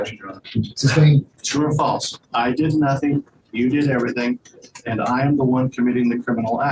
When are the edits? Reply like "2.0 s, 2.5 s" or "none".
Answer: 1.4 s